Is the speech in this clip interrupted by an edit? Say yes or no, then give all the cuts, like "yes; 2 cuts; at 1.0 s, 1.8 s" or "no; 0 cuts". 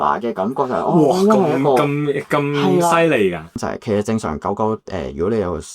yes; 1 cut; at 3.6 s